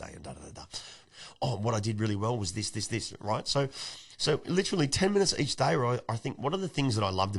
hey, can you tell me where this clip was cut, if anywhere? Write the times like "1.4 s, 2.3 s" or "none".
1.0 s